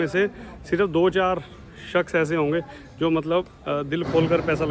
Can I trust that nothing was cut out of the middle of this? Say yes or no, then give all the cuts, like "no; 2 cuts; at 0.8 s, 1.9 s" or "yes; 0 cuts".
yes; 0 cuts